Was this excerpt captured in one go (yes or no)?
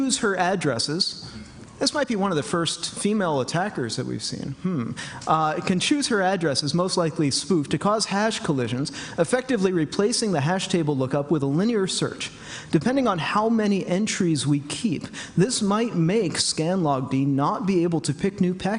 no